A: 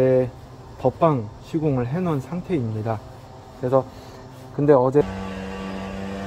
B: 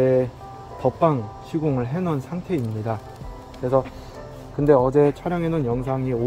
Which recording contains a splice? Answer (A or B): A